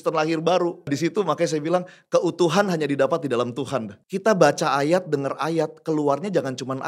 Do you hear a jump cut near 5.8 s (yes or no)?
no